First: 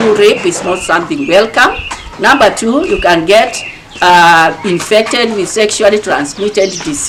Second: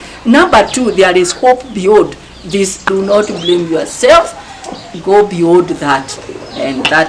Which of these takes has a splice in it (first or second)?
second